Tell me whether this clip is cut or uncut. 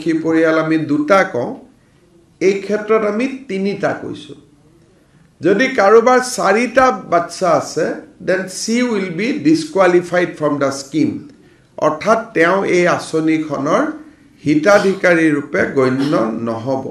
uncut